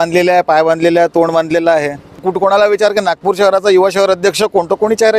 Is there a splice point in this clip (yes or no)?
yes